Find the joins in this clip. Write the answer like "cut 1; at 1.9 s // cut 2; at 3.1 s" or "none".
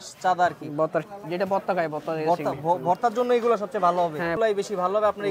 cut 1; at 1.0 s // cut 2; at 4.3 s